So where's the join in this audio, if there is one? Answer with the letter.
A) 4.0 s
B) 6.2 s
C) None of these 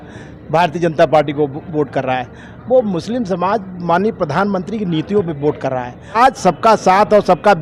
B